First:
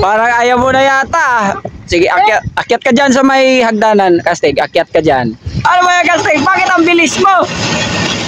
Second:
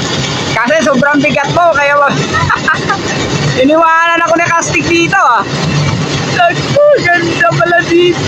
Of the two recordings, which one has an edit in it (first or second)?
first